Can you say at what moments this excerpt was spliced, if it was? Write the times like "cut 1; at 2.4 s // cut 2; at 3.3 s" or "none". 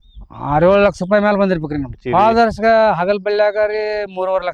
cut 1; at 1.9 s